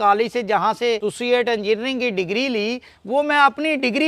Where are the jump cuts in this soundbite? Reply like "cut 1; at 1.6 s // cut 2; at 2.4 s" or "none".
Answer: cut 1; at 1.1 s

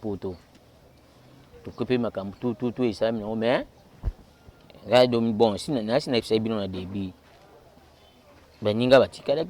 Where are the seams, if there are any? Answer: none

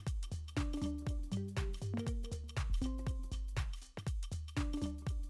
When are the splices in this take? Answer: none

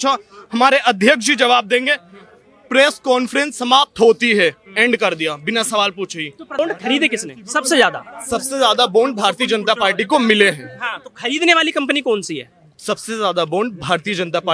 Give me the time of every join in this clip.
cut 1; at 6.6 s

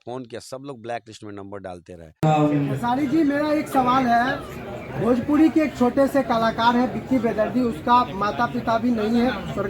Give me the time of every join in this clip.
cut 1; at 2.0 s

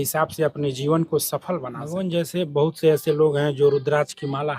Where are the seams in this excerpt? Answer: cut 1; at 1.8 s

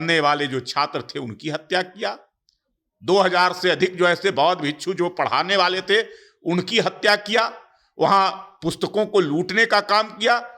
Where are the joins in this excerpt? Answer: none

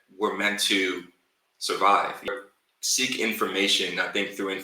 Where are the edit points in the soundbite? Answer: cut 1; at 2.3 s

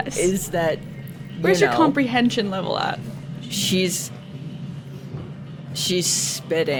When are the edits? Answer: none

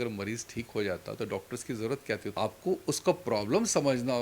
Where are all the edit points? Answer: cut 1; at 2.3 s

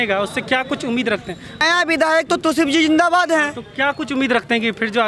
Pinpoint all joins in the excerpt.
cut 1; at 1.6 s

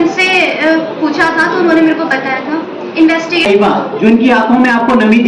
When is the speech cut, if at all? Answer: cut 1; at 3.5 s

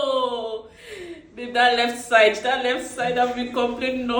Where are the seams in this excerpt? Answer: none

